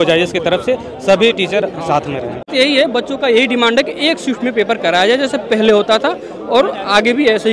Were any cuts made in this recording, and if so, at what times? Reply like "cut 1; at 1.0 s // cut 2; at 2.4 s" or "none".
cut 1; at 2.5 s